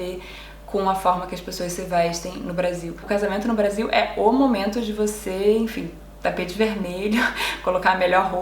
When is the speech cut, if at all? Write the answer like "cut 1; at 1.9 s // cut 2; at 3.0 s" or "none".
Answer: cut 1; at 3.0 s